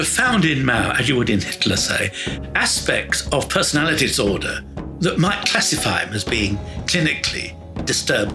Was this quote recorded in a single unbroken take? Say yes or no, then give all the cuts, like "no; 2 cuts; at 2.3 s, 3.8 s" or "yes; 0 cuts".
yes; 0 cuts